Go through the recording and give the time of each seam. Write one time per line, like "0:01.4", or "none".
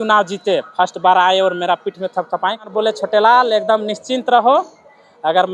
0:02.7